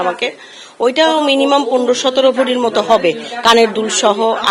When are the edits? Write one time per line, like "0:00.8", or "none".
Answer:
none